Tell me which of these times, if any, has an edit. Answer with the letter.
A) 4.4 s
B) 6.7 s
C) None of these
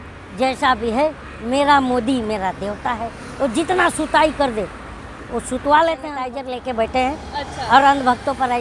B